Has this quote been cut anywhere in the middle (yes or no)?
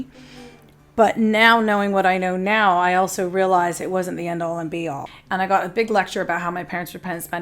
yes